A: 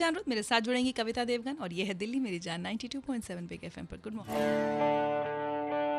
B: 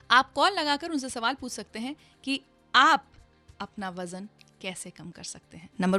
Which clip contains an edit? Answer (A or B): A